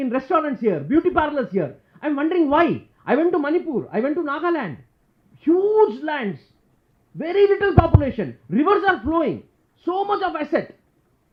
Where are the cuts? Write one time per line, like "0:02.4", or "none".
none